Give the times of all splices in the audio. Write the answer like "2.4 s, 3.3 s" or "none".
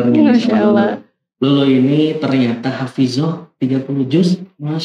none